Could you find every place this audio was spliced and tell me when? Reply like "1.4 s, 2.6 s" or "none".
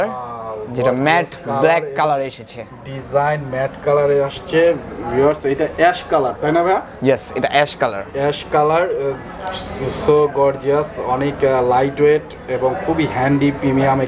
none